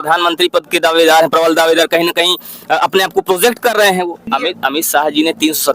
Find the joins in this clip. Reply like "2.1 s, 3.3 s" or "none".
4.3 s